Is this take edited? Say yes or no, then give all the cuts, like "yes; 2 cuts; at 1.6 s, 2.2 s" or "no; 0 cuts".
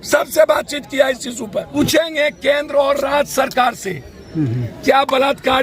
yes; 1 cut; at 1.7 s